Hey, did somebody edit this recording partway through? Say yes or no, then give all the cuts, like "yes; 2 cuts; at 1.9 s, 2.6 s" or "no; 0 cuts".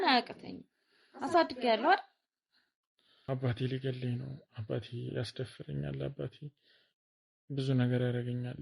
yes; 1 cut; at 3.3 s